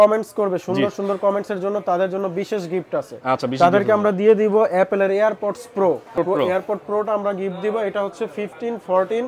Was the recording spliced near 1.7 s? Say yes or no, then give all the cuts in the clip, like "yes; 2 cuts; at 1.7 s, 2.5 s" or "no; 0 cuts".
no; 1 cut; at 6.1 s